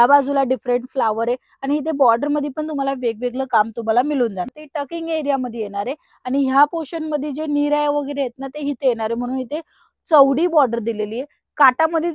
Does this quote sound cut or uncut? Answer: cut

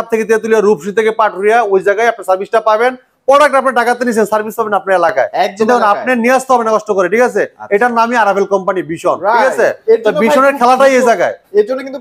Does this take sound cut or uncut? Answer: uncut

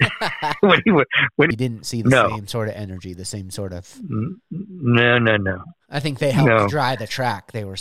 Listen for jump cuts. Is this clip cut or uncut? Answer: cut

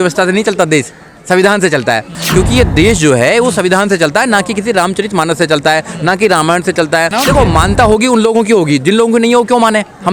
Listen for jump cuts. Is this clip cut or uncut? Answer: cut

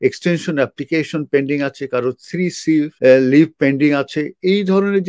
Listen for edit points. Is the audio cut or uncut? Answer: cut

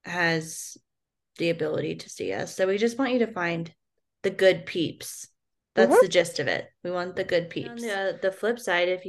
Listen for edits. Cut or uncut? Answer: cut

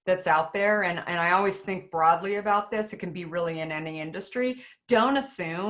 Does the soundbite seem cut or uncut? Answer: uncut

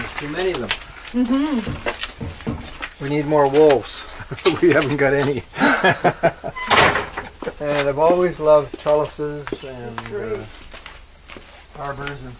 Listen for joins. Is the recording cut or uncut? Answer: cut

